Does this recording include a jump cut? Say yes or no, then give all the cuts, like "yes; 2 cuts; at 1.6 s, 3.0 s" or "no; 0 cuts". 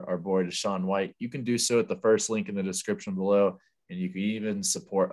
no; 0 cuts